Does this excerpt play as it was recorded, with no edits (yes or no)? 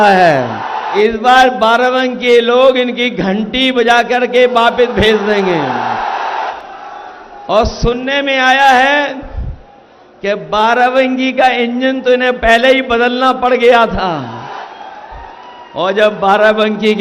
no